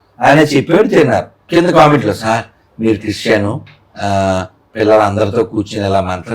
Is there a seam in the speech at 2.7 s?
no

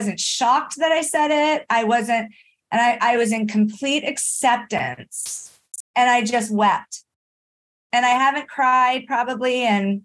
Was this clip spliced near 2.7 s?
no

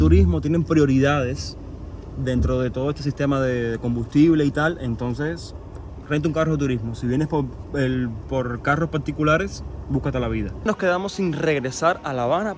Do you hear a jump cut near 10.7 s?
yes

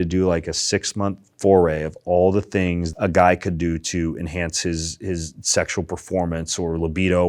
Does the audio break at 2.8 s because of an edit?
yes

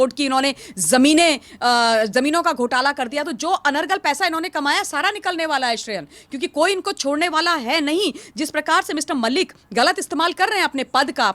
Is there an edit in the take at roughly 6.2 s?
no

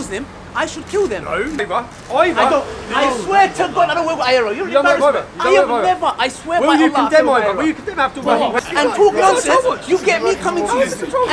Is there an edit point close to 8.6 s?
yes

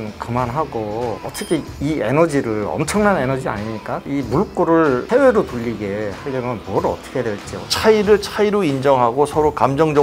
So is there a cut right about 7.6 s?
yes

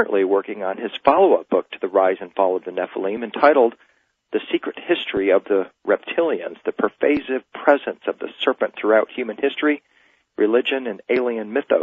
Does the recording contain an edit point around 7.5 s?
no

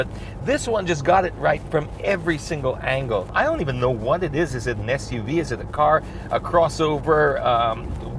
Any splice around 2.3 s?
yes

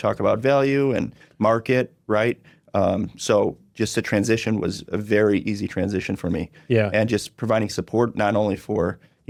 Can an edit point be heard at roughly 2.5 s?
no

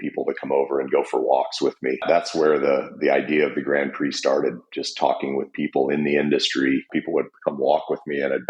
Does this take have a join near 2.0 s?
yes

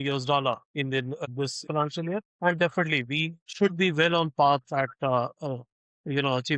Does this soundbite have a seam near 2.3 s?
yes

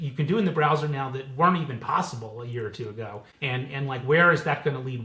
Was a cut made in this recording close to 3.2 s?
yes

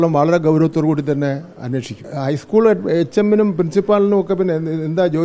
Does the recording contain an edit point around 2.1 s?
yes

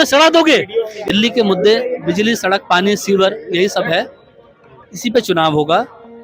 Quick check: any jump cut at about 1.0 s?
yes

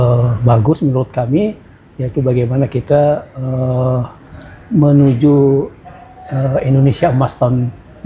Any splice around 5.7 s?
no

